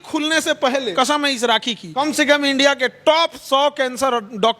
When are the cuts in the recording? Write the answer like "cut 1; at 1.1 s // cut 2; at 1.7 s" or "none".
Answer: cut 1; at 0.9 s // cut 2; at 1.8 s